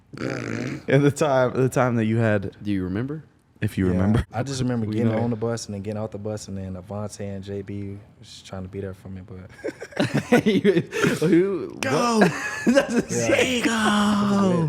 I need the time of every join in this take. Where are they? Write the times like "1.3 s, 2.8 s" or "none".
2.5 s, 4.3 s